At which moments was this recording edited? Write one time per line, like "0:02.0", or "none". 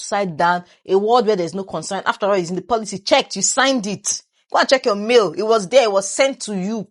none